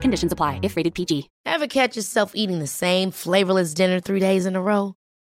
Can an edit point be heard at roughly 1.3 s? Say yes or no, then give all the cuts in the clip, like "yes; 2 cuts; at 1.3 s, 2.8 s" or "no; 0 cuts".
yes; 1 cut; at 1.3 s